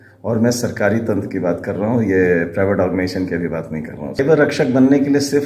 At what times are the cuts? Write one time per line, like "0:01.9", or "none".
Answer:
0:04.2